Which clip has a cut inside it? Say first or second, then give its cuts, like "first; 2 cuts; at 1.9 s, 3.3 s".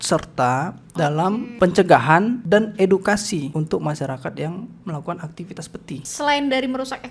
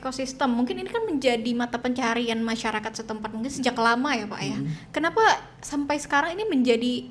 first; 4 cuts; at 1.5 s, 2.4 s, 3.5 s, 6.0 s